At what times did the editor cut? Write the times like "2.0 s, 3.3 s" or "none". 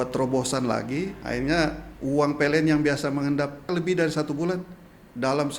1.2 s, 1.9 s, 3.7 s